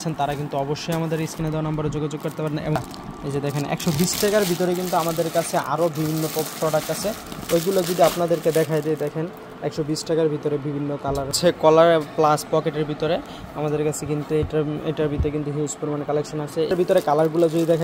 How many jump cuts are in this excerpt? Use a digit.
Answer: 3